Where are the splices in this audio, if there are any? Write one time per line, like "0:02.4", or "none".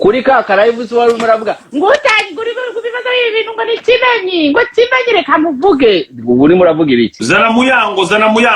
0:07.2

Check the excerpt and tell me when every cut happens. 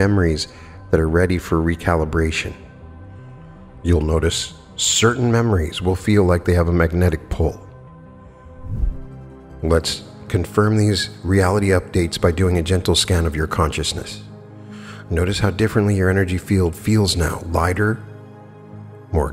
0:08.8

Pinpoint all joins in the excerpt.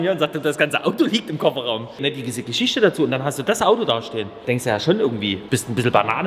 0:02.0
0:04.4
0:05.4

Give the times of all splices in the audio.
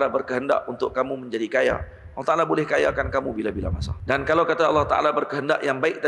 0:03.9

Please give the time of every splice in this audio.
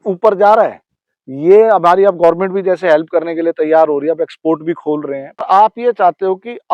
0:05.4

